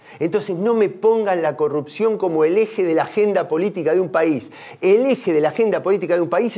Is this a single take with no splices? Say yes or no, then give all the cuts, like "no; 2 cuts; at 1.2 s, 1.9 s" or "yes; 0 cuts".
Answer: yes; 0 cuts